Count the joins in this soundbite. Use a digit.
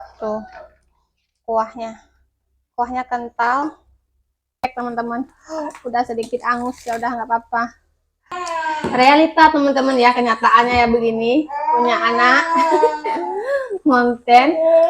2